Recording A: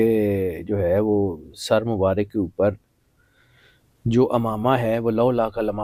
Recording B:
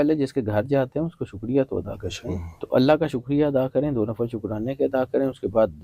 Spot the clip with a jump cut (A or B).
B